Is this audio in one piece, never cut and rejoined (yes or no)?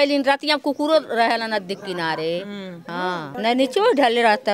no